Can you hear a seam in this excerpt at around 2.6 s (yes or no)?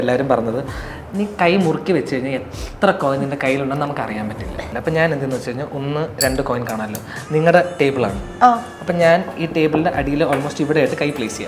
no